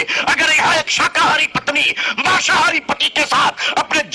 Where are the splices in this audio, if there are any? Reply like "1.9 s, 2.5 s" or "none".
none